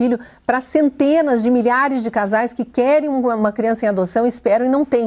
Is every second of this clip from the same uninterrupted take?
yes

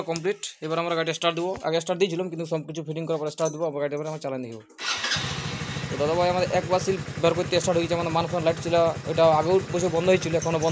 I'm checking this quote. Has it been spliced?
no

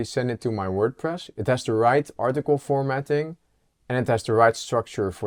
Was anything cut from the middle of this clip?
no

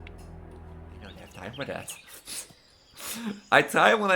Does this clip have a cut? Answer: yes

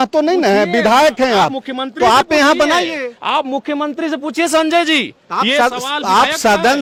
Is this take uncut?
yes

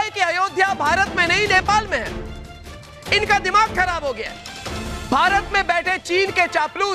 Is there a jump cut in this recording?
no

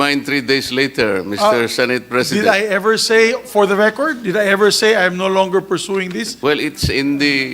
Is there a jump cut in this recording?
yes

